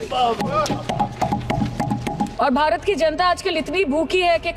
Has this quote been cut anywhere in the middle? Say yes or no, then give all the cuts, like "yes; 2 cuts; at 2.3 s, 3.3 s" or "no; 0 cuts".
yes; 1 cut; at 2.3 s